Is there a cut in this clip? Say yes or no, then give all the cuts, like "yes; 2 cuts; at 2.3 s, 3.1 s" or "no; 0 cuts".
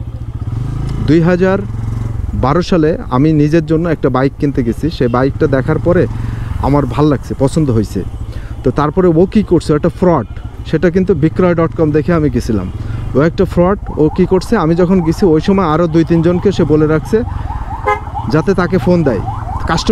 no; 0 cuts